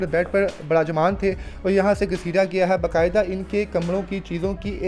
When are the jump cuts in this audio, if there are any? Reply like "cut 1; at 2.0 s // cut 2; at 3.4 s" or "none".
none